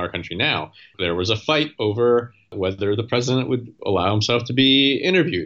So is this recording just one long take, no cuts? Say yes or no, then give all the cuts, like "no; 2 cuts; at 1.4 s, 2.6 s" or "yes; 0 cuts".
no; 3 cuts; at 0.9 s, 2.5 s, 3.7 s